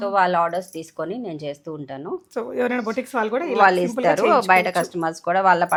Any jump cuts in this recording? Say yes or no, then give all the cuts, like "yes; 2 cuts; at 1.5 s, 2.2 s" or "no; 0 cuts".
no; 0 cuts